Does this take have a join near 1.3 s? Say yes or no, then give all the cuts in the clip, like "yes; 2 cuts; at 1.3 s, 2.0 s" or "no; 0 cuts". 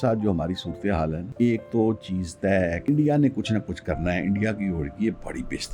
yes; 2 cuts; at 1.3 s, 2.8 s